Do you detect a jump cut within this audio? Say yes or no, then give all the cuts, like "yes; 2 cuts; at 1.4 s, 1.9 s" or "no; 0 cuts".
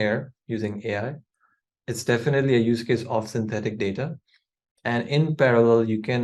no; 0 cuts